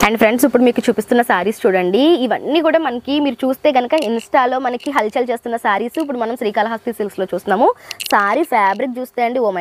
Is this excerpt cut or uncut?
uncut